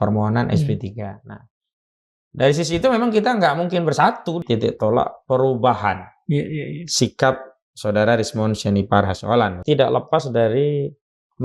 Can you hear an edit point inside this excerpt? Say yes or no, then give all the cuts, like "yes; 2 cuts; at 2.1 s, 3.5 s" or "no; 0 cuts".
yes; 2 cuts; at 4.4 s, 9.6 s